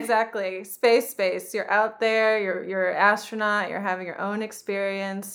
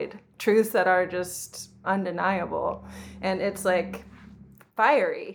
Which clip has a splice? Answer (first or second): second